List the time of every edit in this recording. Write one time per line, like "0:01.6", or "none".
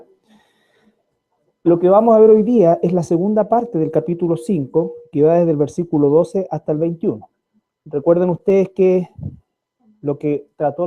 0:05.6